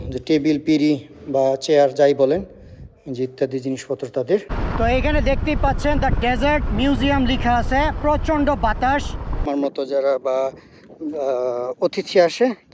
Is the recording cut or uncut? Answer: cut